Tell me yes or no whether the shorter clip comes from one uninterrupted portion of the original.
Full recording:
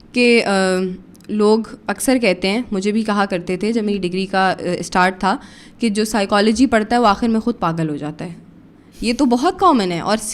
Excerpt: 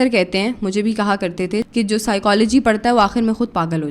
no